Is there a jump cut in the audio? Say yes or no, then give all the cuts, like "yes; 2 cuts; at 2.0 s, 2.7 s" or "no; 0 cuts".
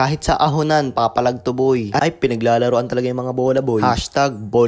yes; 1 cut; at 2.0 s